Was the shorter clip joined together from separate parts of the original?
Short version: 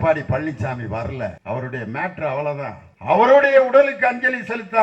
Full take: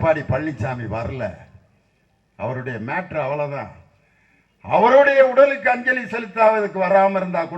yes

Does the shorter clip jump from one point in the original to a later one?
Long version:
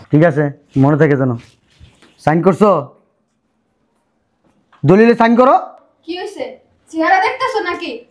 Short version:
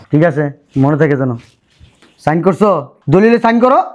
yes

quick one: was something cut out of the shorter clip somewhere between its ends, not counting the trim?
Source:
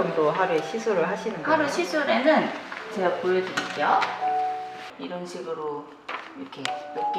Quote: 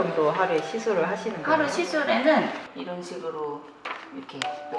yes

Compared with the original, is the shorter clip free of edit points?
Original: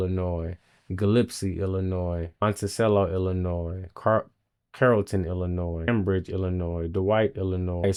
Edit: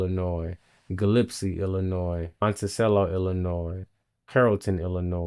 no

